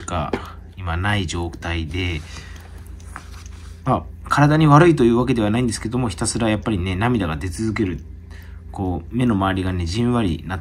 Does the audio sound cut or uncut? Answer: uncut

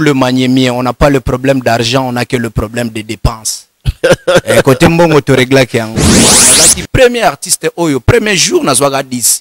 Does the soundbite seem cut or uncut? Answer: cut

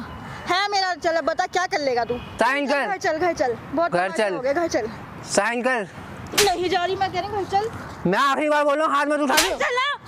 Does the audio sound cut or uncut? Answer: cut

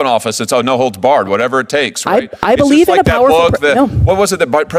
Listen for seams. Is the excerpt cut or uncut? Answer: uncut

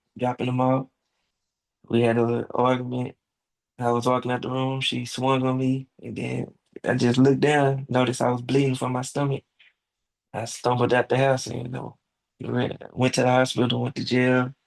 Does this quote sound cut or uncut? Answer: uncut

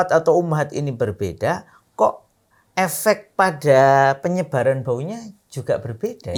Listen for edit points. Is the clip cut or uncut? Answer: uncut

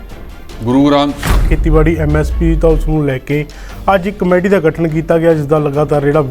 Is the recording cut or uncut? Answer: cut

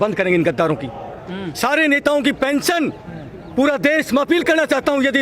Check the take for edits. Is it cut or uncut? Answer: uncut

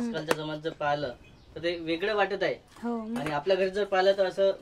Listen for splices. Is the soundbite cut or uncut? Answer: uncut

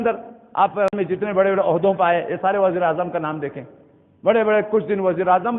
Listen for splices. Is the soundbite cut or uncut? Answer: cut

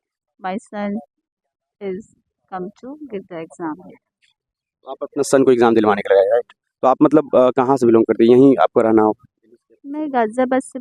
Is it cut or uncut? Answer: uncut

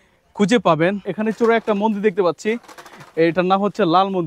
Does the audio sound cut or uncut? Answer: cut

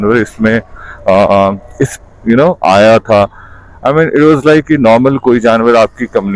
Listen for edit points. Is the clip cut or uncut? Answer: cut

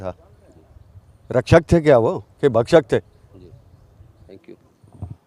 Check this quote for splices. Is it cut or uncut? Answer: uncut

